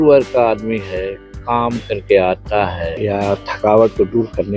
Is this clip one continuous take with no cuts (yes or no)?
no